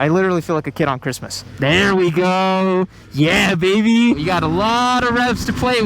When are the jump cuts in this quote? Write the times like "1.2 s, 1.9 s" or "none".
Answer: 1.4 s, 4.2 s

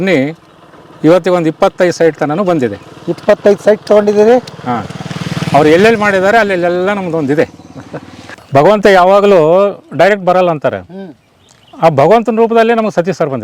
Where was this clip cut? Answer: 8.3 s

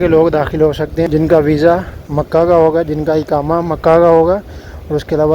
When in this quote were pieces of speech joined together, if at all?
1.1 s

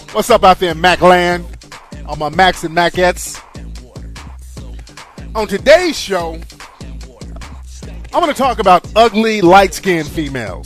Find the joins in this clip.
none

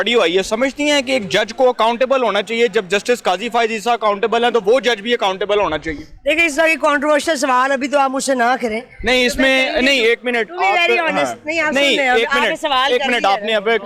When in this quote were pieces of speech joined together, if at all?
none

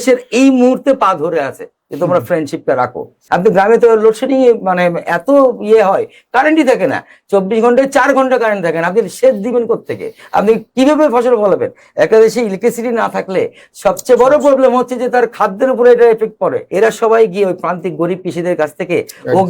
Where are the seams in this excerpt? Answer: 3.1 s, 16.6 s

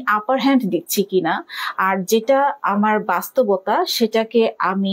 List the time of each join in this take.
none

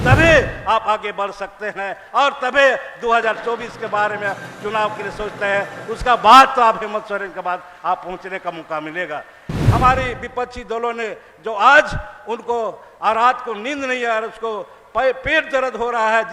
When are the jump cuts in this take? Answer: 9.5 s

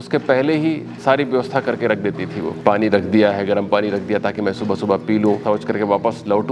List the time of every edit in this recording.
2.5 s, 5.4 s

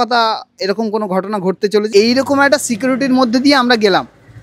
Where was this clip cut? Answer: 1.9 s

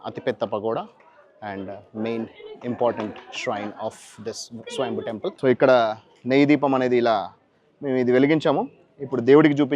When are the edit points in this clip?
5.4 s

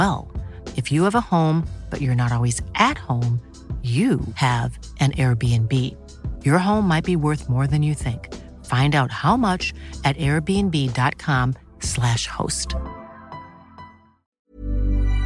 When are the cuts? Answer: 14.3 s

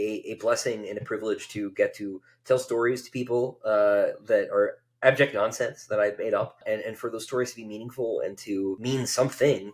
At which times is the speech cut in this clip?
6.6 s, 8.8 s

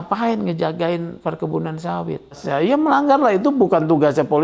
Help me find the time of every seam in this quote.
2.4 s

